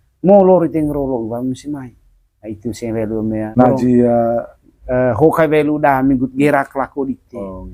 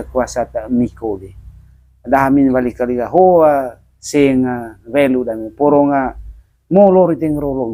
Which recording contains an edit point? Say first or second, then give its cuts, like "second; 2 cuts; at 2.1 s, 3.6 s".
first; 1 cut; at 3.4 s